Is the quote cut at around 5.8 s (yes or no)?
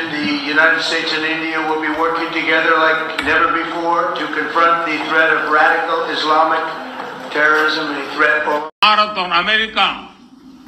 no